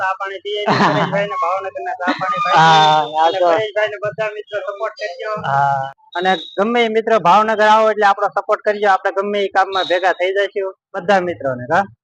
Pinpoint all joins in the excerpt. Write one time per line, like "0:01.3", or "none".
0:05.8